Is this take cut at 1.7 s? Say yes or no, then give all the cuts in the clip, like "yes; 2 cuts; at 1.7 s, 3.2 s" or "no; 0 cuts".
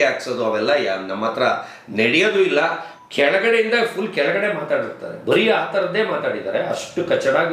no; 1 cut; at 2.9 s